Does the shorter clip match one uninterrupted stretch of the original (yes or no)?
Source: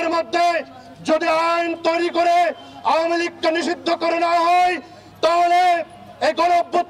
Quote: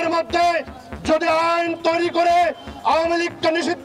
yes